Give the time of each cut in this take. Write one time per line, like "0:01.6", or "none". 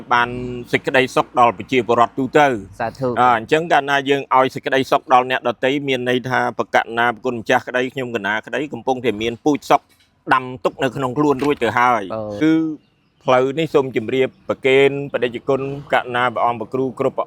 0:12.4